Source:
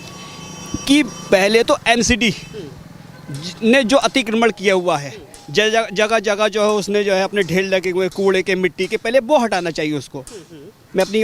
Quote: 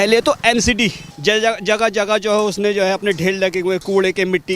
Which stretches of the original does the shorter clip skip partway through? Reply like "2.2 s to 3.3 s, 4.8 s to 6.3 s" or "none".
2.5 s to 5.4 s